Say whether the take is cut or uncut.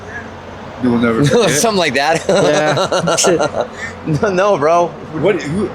uncut